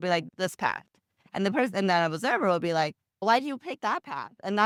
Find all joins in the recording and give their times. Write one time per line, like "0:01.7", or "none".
none